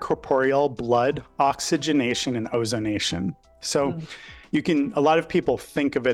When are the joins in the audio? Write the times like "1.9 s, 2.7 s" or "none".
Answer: none